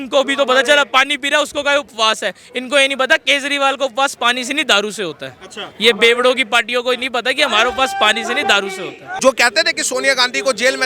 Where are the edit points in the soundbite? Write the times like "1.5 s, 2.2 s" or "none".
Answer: 9.1 s

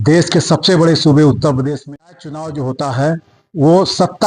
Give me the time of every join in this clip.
1.7 s

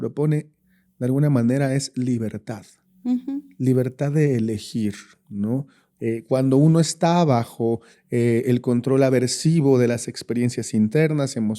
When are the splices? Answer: none

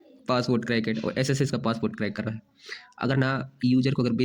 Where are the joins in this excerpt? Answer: none

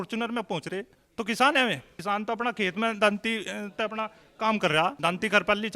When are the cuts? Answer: 1.0 s, 1.9 s, 5.0 s

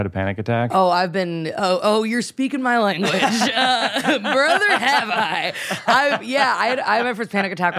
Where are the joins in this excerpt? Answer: none

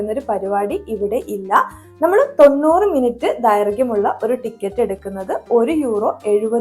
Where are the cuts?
none

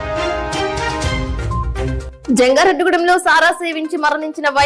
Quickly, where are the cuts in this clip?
2.1 s

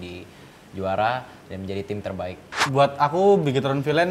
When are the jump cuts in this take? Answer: 2.6 s

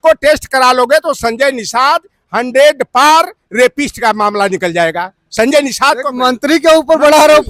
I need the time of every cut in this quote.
none

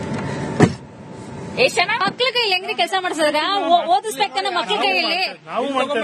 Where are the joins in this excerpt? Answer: 1.7 s

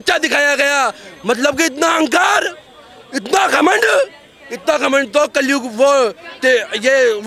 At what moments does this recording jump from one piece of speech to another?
none

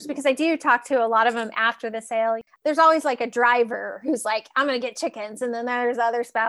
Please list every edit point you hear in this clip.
2.5 s

